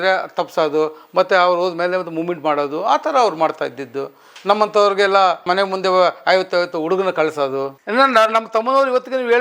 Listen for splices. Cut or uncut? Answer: cut